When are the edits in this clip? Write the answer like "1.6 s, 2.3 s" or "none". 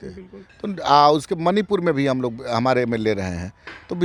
none